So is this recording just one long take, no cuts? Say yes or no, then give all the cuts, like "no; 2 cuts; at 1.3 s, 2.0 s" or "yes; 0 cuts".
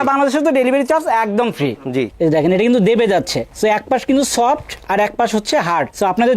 no; 1 cut; at 2.1 s